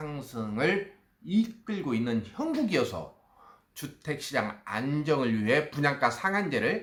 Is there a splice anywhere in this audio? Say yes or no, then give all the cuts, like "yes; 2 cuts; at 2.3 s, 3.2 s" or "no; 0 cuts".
no; 0 cuts